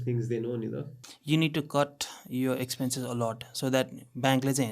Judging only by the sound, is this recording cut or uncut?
cut